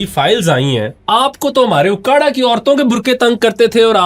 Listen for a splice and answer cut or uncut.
cut